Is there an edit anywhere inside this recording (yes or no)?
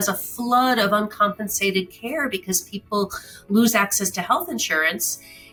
no